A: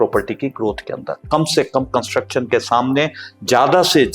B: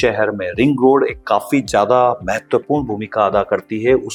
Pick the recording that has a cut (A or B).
A